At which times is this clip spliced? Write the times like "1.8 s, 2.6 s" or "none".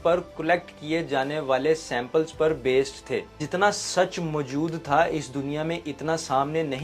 3.4 s

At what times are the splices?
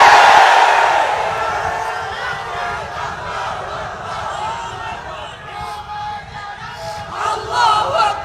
none

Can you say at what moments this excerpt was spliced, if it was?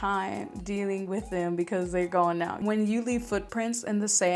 2.6 s

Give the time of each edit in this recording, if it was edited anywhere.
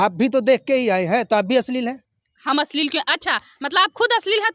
none

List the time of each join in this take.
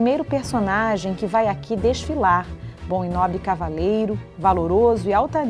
none

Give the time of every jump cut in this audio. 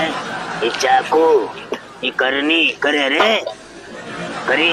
none

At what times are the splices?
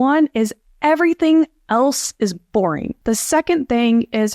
2.9 s

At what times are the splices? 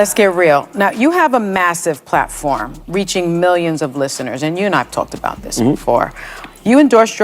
0.9 s

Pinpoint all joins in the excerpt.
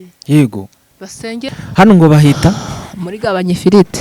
1.4 s

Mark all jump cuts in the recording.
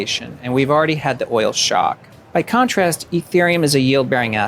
2.1 s

